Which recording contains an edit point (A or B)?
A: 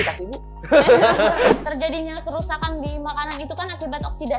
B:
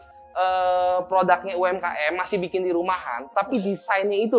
A